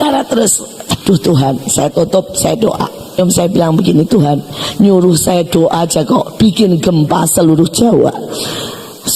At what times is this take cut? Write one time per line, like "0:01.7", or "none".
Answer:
0:00.9
0:03.2